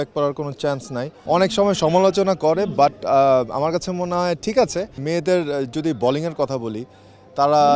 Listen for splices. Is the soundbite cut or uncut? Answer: cut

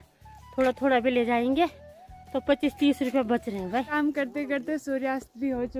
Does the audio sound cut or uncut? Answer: cut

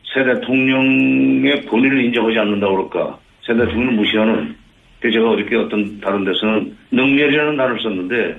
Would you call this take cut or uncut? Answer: uncut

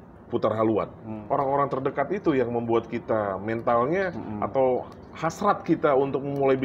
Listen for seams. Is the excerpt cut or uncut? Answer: cut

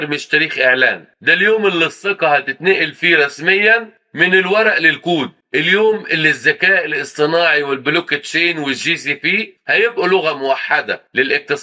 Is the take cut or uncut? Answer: uncut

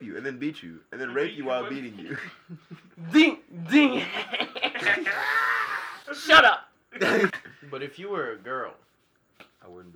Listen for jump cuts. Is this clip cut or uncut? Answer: cut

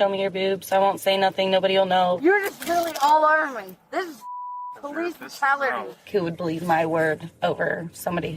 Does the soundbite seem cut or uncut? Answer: cut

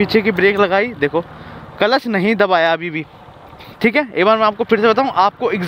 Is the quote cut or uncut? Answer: uncut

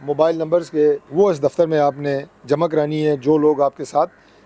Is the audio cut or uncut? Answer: cut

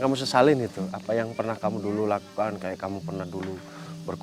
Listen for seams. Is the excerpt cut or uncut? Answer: uncut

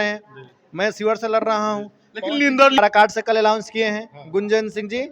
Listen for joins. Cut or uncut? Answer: cut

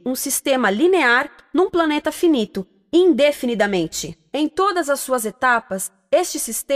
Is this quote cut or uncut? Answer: uncut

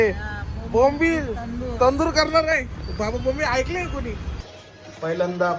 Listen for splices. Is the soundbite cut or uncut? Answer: cut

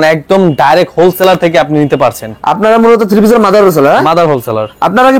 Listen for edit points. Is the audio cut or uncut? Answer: uncut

